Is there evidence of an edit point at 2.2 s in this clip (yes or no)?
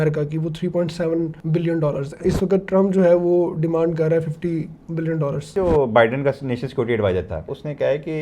yes